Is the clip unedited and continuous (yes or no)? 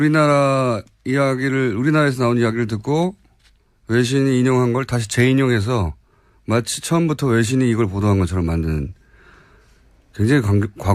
yes